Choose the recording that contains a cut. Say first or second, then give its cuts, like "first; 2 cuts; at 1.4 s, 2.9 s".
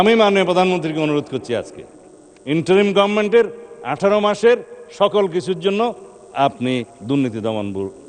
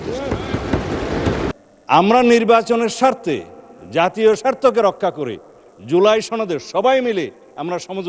second; 1 cut; at 1.5 s